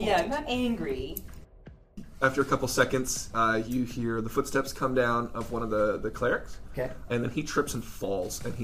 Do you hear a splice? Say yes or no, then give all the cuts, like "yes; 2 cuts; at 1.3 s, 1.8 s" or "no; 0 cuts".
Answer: yes; 1 cut; at 1.7 s